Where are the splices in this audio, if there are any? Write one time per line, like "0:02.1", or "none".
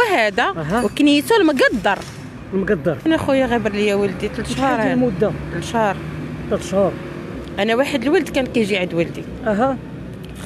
0:03.1